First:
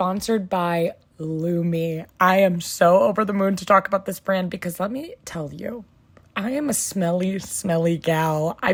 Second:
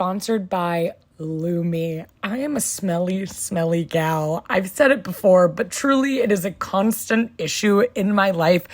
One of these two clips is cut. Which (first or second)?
second